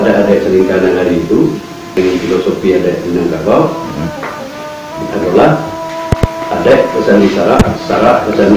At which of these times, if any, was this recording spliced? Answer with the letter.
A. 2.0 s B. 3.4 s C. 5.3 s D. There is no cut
A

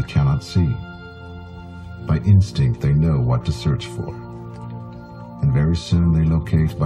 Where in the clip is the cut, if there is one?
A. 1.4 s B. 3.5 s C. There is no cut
C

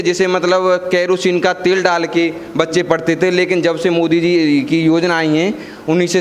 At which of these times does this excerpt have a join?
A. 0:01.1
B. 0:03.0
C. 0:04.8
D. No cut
D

